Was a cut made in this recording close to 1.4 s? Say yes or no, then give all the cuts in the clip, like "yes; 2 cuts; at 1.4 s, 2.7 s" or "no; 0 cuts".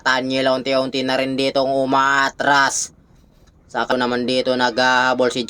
no; 1 cut; at 3.9 s